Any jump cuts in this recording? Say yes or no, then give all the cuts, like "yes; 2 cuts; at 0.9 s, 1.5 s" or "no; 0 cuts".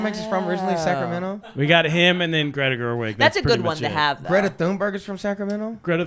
yes; 1 cut; at 1.6 s